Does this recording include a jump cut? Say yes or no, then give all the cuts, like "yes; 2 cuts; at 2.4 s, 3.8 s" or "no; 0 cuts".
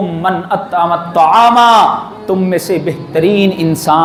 no; 0 cuts